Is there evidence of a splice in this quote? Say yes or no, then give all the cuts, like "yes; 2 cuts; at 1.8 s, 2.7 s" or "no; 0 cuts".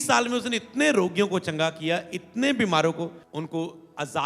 yes; 1 cut; at 3.2 s